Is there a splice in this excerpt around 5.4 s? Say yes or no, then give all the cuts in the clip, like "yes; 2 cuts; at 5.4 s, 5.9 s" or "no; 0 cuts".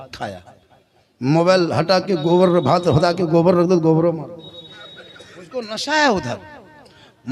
no; 0 cuts